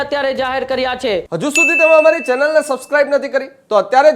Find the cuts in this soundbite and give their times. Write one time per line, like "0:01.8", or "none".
0:01.3